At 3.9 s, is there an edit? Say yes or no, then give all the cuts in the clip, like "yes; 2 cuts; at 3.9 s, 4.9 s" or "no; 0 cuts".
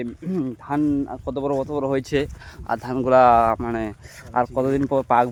no; 0 cuts